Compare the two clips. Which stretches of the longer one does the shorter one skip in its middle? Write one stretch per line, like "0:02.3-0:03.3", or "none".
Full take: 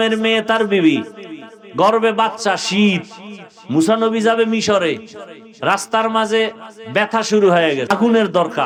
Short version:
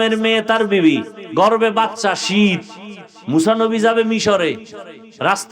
0:01.2-0:01.6